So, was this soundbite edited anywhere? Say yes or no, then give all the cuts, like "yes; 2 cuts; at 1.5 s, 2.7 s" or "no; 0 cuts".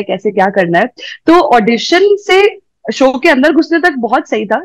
no; 0 cuts